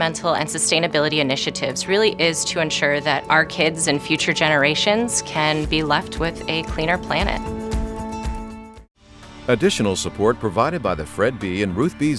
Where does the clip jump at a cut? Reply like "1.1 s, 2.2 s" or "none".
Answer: 9.3 s